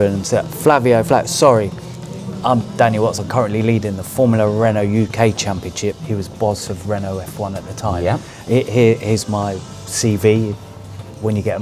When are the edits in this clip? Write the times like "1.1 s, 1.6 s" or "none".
none